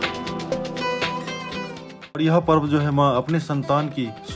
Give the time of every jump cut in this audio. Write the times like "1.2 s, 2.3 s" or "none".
2.1 s